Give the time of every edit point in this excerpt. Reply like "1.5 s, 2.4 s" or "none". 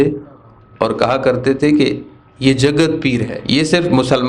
3.3 s

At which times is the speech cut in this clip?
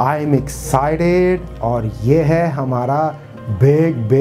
none

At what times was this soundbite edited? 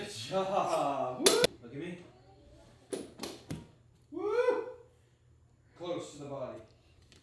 1.5 s

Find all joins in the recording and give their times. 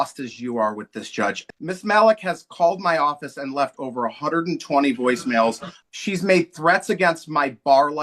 1.4 s, 5.7 s

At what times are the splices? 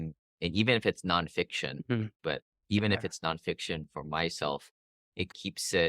2.1 s

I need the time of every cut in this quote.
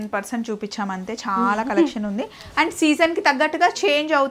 none

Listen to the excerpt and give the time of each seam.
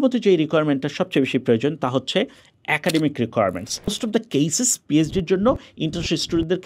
4.0 s

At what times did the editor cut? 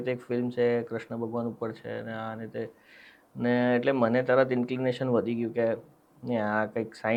none

